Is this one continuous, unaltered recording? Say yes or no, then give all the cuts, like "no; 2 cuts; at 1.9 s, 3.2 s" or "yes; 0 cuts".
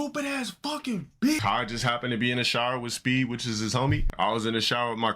no; 2 cuts; at 1.4 s, 4.1 s